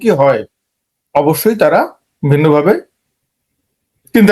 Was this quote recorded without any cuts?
yes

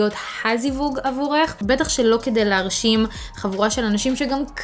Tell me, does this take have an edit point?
yes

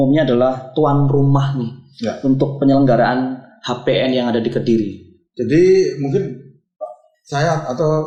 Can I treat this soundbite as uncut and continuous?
yes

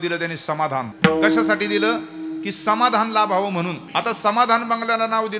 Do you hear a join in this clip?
yes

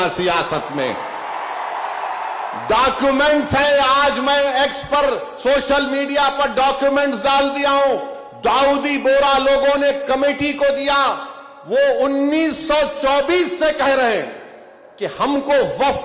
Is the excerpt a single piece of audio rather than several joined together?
yes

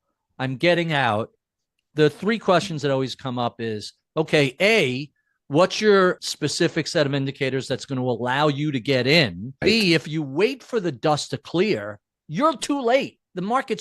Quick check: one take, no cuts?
no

